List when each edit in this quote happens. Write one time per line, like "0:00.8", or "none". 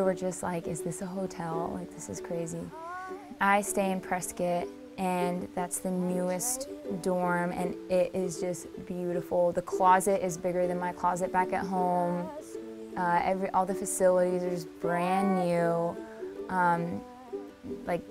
0:09.3